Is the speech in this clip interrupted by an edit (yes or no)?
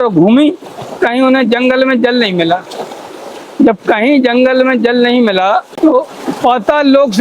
yes